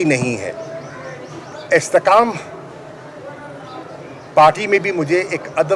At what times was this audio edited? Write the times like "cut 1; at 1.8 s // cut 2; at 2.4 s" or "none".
cut 1; at 1.5 s